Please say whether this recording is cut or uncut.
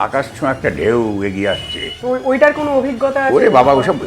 cut